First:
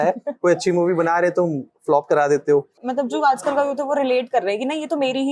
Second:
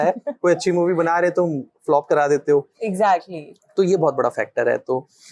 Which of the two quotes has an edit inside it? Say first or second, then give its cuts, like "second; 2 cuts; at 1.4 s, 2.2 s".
first; 1 cut; at 2.7 s